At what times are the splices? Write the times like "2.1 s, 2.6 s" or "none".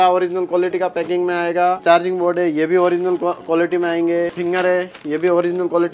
1.8 s, 4.4 s